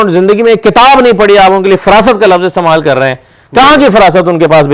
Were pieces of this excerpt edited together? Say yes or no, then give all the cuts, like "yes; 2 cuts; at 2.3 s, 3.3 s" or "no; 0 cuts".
no; 0 cuts